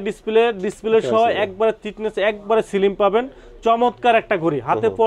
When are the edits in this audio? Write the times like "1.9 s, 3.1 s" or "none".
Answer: none